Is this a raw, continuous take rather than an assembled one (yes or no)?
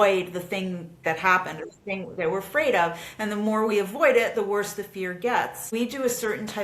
no